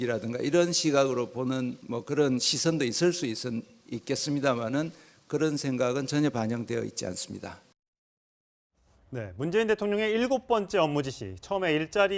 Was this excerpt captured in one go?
yes; 0 cuts

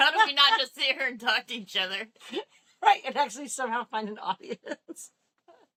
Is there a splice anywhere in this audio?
no; 0 cuts

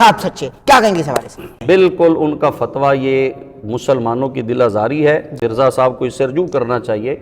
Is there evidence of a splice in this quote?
yes; 2 cuts; at 1.6 s, 5.4 s

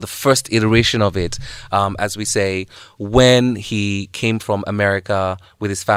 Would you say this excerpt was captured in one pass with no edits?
yes; 0 cuts

